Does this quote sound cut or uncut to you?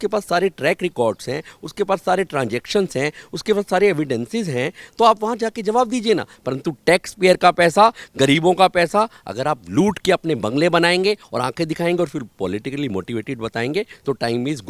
cut